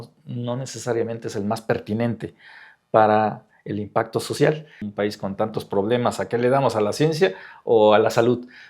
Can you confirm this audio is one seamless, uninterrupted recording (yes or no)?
no